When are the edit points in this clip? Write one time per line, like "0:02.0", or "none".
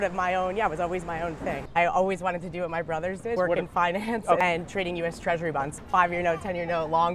0:01.6
0:03.4
0:04.4
0:05.7

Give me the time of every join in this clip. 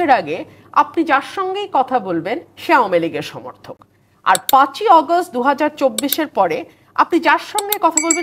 none

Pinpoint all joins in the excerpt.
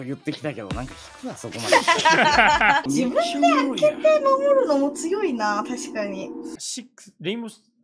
0:02.8
0:06.6

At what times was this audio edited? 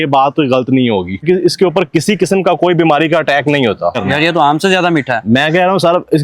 0:01.2
0:03.9

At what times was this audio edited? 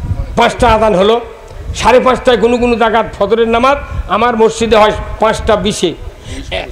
none

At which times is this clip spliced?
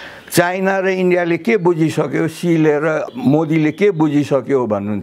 0:03.1

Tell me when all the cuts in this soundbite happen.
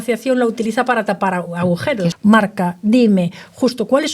0:02.1

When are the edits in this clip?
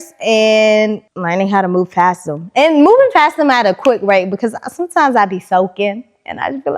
0:01.1

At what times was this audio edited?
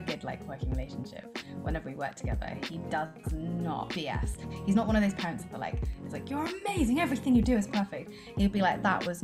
none

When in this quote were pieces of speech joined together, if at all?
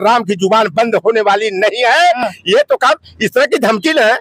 none

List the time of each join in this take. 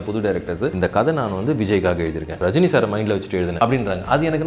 0:00.7
0:02.3
0:03.5

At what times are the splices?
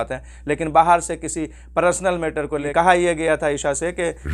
0:02.7

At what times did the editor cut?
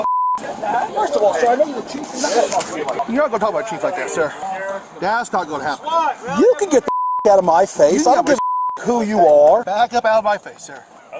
0:00.9
0:03.0
0:04.4
0:09.7

